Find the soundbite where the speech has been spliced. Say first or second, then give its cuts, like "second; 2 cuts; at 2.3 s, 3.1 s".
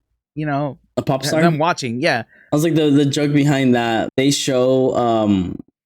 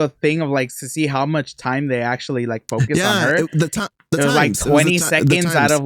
first; 2 cuts; at 2.4 s, 4.1 s